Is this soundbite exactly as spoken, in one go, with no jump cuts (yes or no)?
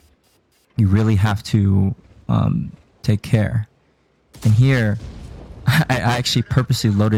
yes